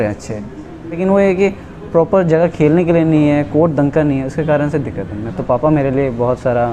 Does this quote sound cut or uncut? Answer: cut